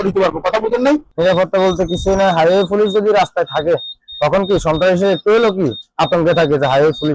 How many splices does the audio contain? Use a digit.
1